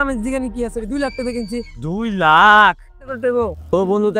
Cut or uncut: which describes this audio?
cut